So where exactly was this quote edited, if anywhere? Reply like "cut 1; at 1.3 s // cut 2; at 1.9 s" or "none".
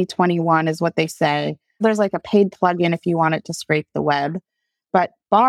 cut 1; at 1.8 s